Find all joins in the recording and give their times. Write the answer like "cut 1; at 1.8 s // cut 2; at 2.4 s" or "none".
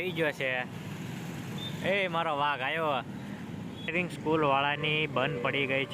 cut 1; at 3.9 s

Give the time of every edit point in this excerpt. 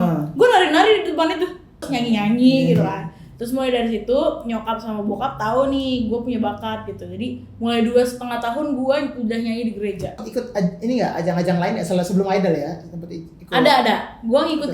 cut 1; at 1.9 s // cut 2; at 10.2 s

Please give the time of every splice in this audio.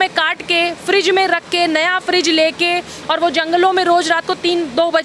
none

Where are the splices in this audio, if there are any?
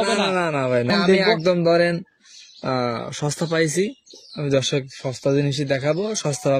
cut 1; at 0.9 s

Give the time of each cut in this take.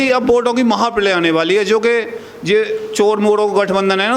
none

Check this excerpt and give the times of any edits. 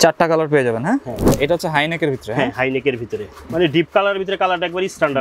cut 1; at 1.3 s // cut 2; at 3.5 s

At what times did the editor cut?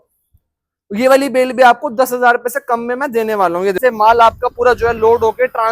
cut 1; at 3.8 s

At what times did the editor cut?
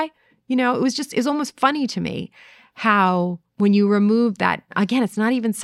cut 1; at 3.4 s // cut 2; at 4.7 s

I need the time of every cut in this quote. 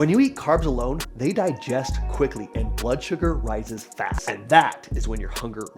cut 1; at 4.2 s

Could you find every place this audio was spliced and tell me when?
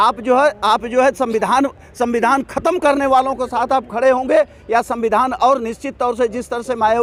none

